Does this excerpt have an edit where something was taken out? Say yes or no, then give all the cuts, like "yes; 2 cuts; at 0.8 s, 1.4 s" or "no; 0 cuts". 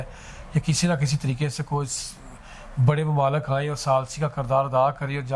no; 0 cuts